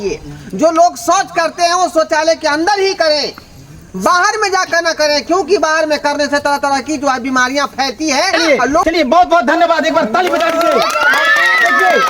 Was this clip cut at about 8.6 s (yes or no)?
yes